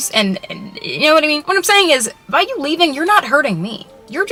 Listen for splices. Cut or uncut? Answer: uncut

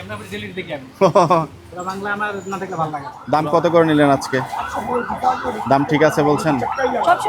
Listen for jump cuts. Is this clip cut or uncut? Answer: cut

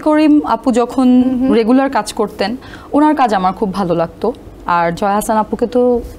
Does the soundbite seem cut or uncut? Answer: uncut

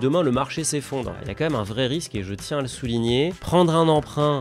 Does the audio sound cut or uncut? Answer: cut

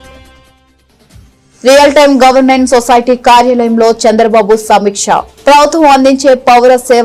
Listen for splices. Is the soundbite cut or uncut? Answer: uncut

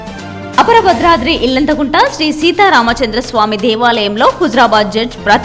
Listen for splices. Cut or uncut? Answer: uncut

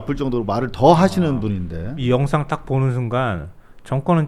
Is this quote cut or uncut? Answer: cut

